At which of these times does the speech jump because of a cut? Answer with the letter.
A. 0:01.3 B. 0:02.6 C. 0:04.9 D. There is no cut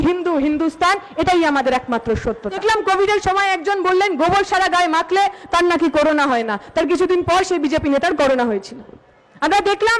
B